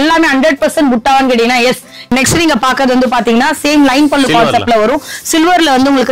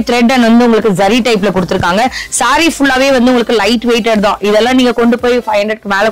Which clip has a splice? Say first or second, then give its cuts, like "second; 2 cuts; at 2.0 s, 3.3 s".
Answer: first; 1 cut; at 2.1 s